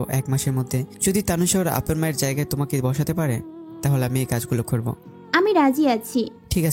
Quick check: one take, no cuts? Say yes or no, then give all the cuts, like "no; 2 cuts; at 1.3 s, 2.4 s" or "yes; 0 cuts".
no; 1 cut; at 0.9 s